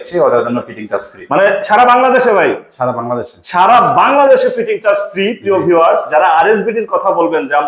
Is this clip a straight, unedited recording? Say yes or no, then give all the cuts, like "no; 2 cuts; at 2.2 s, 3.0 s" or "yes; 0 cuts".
yes; 0 cuts